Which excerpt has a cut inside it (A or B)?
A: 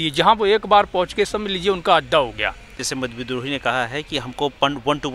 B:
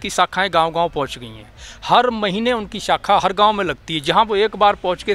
A